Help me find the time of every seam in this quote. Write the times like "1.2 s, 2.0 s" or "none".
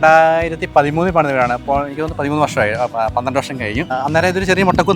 3.9 s

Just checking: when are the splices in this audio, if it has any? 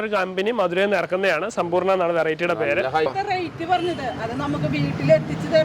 3.1 s

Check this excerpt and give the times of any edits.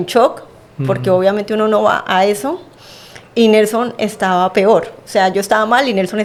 none

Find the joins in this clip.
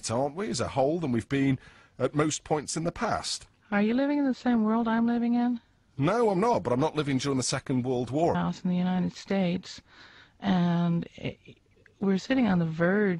none

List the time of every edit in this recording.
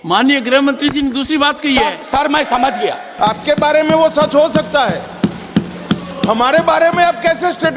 3.1 s

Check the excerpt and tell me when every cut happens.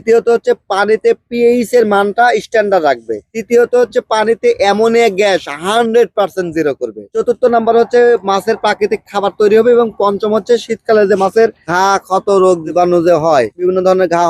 none

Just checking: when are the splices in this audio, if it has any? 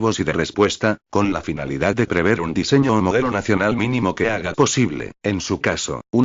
1.0 s

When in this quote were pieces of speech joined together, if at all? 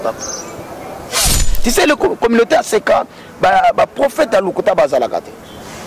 1.5 s

